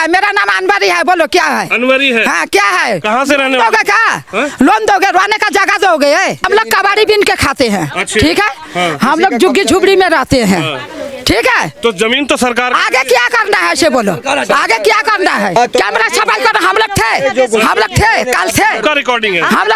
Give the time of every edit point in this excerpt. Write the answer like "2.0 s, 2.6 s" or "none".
6.4 s, 15.6 s